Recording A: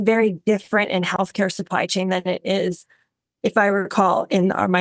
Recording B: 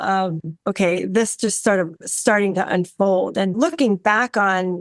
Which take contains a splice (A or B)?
B